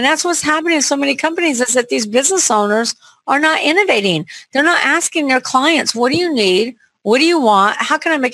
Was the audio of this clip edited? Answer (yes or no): no